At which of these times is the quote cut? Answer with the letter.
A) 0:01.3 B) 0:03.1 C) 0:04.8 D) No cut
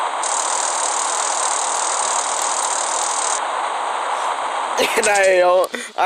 C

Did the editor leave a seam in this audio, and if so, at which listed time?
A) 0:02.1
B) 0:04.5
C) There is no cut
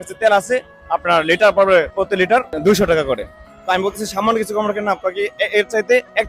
A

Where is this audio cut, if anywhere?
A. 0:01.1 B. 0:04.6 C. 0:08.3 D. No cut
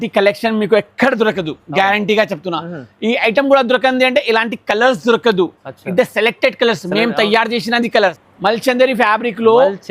C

